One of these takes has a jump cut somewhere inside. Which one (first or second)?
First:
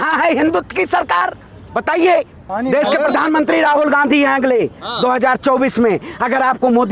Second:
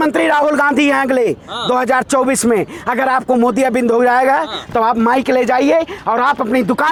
first